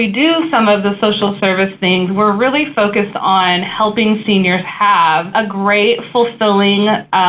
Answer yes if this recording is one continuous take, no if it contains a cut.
no